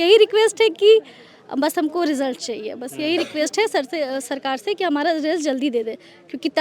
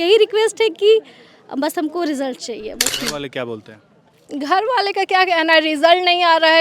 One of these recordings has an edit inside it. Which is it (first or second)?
second